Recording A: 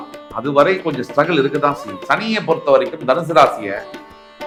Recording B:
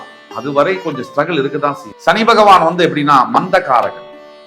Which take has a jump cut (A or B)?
B